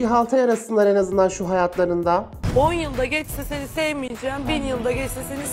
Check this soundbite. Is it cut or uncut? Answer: uncut